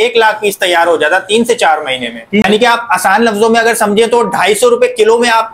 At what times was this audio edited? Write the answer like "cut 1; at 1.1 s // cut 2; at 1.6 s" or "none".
cut 1; at 2.4 s